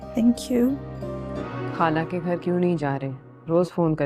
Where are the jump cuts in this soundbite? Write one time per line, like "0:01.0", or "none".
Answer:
0:01.4